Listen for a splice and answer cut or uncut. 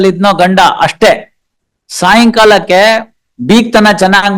uncut